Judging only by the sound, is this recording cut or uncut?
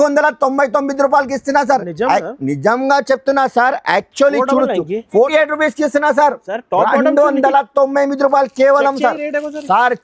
cut